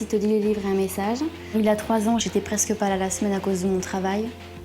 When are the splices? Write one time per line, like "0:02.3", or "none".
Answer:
0:01.4